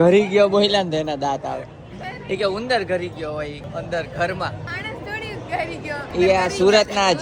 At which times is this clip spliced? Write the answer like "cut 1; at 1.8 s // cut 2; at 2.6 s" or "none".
cut 1; at 3.6 s // cut 2; at 4.7 s // cut 3; at 6.1 s